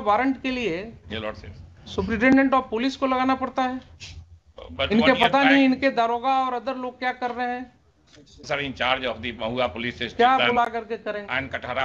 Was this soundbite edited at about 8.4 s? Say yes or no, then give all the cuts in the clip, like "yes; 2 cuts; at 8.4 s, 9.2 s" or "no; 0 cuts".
yes; 1 cut; at 8.4 s